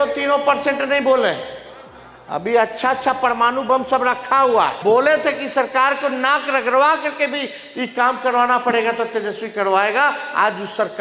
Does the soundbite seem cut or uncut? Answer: cut